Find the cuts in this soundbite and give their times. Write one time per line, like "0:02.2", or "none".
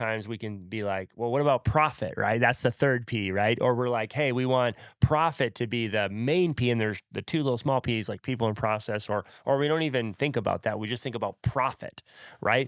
none